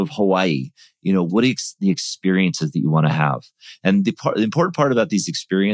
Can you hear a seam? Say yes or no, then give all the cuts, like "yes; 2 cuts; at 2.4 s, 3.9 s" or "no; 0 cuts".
yes; 1 cut; at 1.3 s